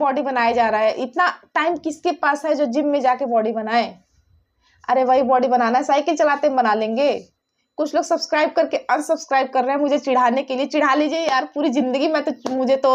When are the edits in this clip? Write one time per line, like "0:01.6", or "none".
0:07.3